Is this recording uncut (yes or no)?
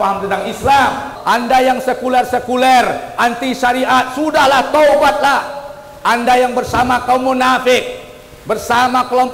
no